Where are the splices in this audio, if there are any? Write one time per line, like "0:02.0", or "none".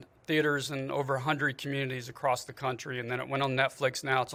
none

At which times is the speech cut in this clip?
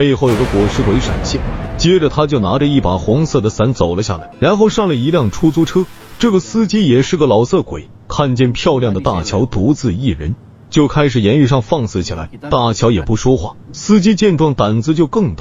none

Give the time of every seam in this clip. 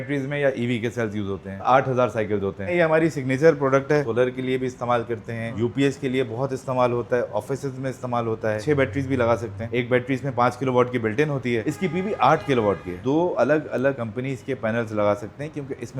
0:01.6
0:02.7
0:04.1
0:08.6
0:11.6
0:13.0

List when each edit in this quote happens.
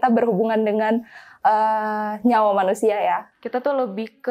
0:03.3

